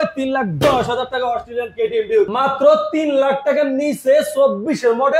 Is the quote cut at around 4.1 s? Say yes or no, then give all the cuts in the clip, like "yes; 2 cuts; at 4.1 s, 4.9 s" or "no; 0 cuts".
no; 1 cut; at 2.3 s